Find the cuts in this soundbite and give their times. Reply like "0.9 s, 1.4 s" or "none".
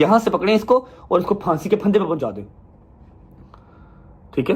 none